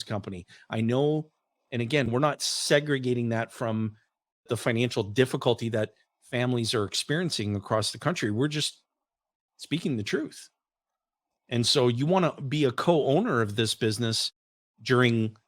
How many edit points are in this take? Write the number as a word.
two